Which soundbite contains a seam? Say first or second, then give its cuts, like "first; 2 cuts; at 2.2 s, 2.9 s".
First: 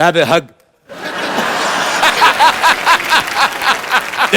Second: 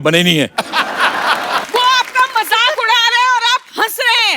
second; 1 cut; at 1.6 s